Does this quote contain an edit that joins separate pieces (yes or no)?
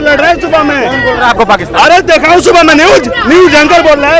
no